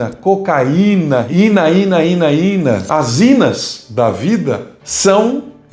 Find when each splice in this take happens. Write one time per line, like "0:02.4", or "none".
0:01.3
0:02.8